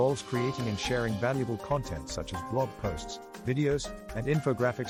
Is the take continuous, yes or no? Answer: yes